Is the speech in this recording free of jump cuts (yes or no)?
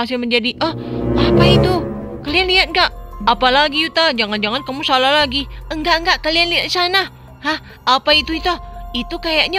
yes